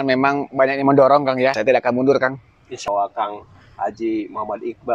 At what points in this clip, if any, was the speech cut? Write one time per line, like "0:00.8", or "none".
0:01.6
0:02.8